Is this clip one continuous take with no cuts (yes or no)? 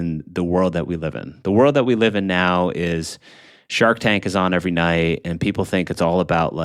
yes